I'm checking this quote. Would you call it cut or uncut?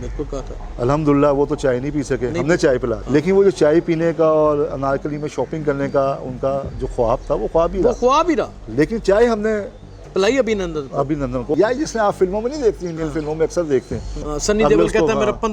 cut